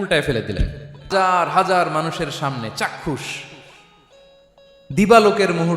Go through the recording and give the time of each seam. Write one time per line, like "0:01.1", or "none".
0:01.1